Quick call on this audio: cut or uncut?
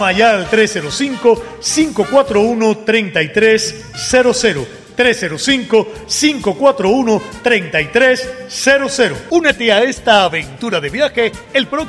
uncut